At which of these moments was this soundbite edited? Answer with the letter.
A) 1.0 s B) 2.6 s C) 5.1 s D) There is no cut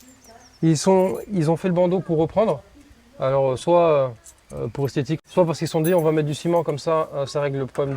C